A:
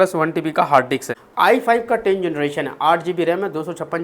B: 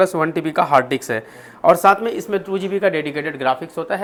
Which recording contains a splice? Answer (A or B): A